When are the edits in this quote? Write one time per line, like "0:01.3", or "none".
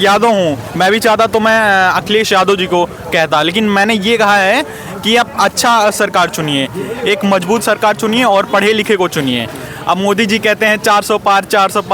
none